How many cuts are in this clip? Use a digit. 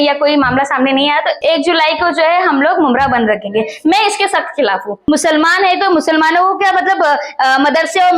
2